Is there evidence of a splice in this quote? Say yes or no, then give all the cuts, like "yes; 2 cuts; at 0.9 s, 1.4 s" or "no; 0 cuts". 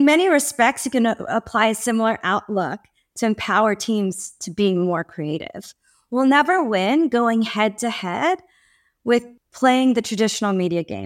yes; 1 cut; at 9.4 s